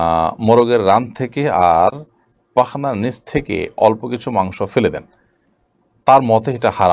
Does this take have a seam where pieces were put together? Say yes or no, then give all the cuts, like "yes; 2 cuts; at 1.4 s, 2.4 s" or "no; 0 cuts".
no; 0 cuts